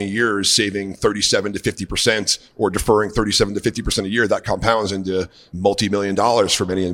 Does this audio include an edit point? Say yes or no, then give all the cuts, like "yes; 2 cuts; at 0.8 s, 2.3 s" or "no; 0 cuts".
yes; 1 cut; at 5.4 s